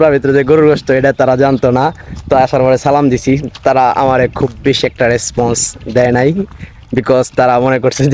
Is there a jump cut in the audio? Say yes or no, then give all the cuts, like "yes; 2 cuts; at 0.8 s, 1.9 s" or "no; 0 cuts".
no; 0 cuts